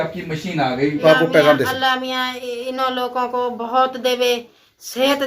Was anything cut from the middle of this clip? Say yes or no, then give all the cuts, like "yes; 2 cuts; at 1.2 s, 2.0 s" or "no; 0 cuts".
yes; 1 cut; at 1.0 s